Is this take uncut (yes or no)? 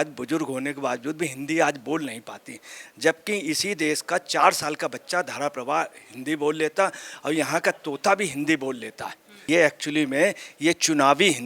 no